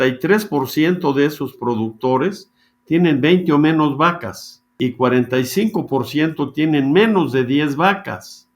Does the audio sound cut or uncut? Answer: cut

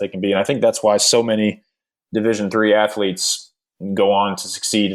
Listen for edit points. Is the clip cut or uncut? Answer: uncut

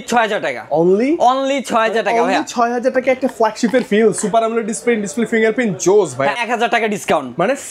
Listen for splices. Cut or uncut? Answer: cut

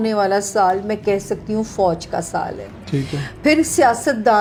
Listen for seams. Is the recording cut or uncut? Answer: uncut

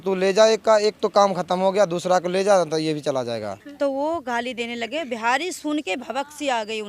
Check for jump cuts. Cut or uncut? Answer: cut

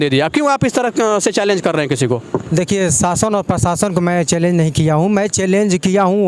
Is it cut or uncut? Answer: uncut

